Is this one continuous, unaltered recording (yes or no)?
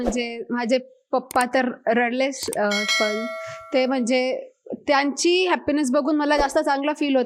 yes